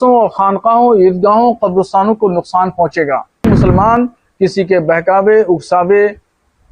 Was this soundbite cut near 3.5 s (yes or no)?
yes